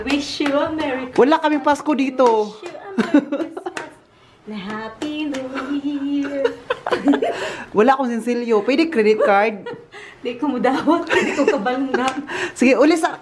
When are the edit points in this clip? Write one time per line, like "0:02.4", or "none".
none